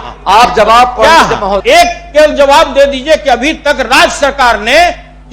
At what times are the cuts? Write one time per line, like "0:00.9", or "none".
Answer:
0:01.6